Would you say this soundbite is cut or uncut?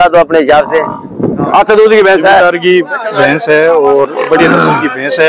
cut